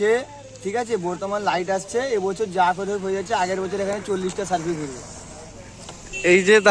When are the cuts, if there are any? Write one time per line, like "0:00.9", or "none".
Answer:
none

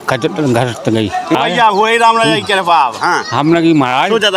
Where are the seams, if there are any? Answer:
0:01.3

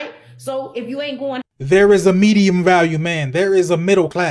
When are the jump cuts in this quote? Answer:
0:01.5

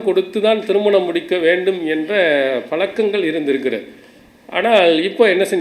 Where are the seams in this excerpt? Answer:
none

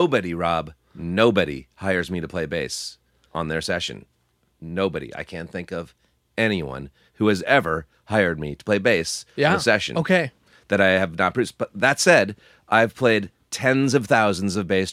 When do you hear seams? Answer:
none

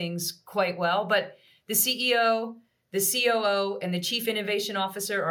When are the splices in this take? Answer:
none

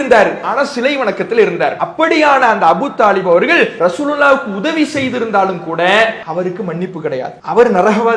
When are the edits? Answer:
0:01.8
0:06.2
0:07.4

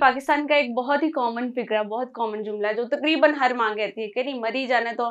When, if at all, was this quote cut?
none

